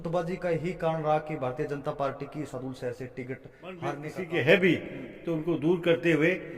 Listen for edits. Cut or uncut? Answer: cut